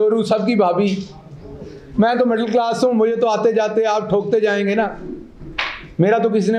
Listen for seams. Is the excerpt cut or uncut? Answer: uncut